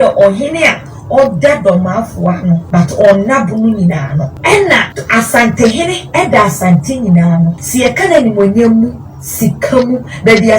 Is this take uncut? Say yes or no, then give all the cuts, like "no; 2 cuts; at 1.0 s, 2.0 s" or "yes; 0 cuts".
no; 4 cuts; at 2.6 s, 4.3 s, 5.0 s, 7.6 s